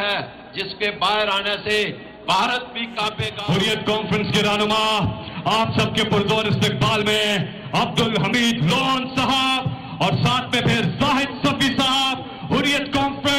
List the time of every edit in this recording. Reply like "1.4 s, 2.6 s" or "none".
3.3 s

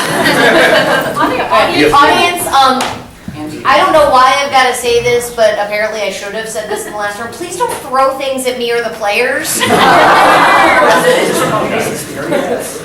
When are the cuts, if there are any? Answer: none

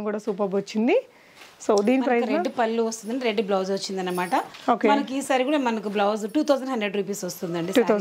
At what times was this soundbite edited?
none

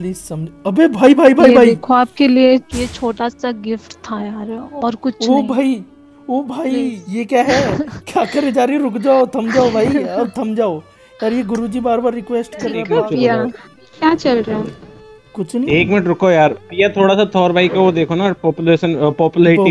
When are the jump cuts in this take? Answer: 2.7 s, 7.0 s, 12.8 s

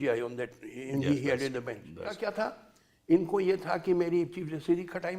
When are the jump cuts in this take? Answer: 2.2 s

